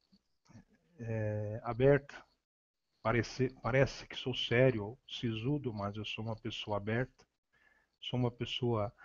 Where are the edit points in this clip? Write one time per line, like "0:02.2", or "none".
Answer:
none